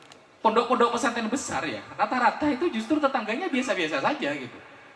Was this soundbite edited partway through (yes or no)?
no